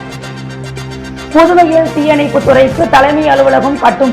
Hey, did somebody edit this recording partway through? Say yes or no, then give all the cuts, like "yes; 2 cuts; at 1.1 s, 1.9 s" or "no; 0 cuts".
no; 0 cuts